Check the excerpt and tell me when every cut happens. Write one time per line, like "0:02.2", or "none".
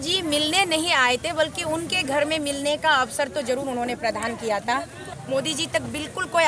0:05.0